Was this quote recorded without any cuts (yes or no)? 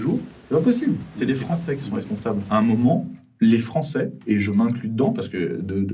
no